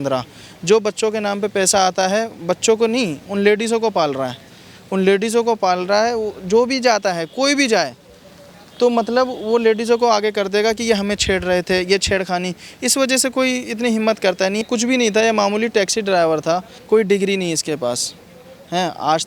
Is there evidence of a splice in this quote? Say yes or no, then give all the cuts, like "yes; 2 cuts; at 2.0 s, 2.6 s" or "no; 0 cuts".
yes; 2 cuts; at 14.6 s, 16.7 s